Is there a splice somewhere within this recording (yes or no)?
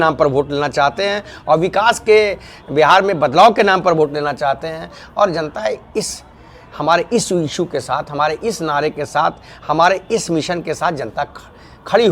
no